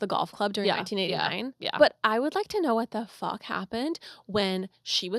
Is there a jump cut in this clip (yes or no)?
no